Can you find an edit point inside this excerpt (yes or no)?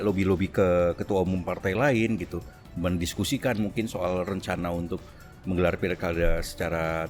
no